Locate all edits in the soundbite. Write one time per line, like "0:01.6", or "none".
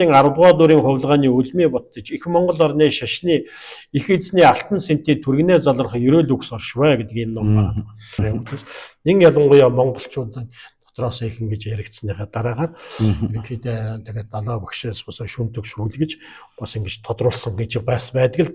0:08.2